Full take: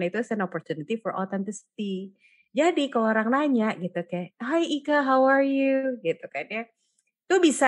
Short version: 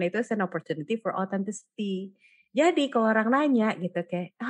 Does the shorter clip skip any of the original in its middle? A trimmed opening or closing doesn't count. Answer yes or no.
no